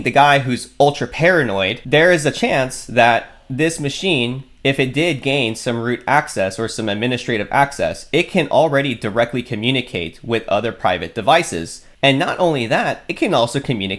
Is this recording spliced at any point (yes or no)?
no